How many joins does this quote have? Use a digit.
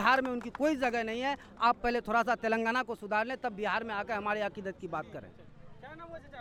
0